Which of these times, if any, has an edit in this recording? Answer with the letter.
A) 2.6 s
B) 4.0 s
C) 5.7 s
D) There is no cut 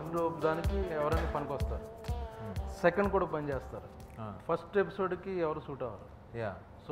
D